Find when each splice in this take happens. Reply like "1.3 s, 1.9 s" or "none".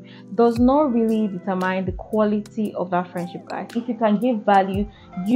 3.7 s